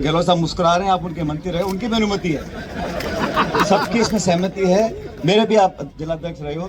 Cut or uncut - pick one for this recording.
uncut